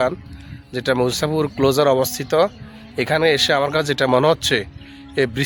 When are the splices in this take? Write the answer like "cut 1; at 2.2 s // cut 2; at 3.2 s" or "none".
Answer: none